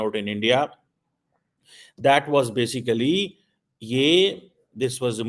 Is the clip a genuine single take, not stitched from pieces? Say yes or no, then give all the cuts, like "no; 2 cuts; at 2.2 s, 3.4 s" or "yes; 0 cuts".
yes; 0 cuts